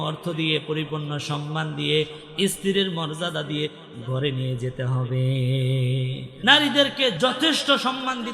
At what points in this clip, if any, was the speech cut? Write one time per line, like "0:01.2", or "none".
0:06.2
0:07.2